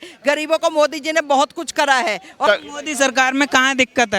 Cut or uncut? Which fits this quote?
cut